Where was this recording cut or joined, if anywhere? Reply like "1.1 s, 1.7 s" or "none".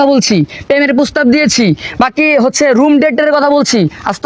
none

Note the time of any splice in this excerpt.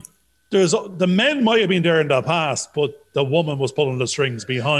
none

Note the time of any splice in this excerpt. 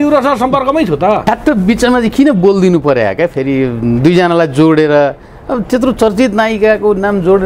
1.2 s

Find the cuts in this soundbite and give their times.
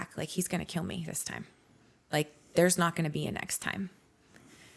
none

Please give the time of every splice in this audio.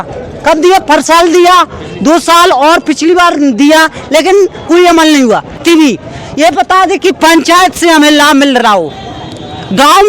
5.6 s

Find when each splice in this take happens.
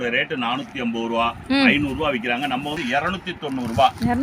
2.7 s

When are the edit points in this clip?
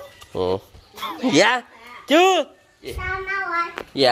2.9 s

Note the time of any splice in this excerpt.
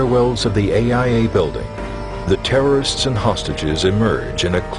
2.1 s

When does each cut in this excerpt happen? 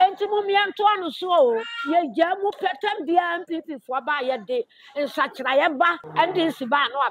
6.0 s

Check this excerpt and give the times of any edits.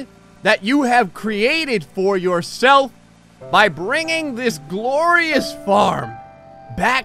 none

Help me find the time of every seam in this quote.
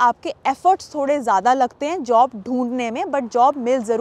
none

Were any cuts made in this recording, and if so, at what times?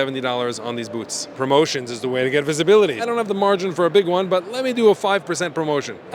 1.3 s, 3.0 s

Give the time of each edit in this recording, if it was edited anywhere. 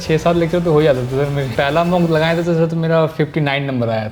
1.5 s

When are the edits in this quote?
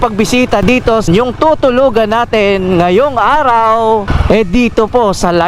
1.1 s, 4.1 s

